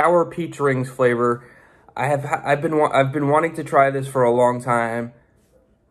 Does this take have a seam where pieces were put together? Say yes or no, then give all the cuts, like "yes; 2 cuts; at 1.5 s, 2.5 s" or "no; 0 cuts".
no; 0 cuts